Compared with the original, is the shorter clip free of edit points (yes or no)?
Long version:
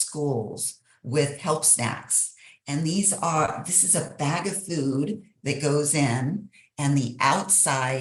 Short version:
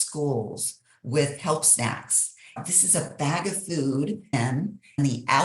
no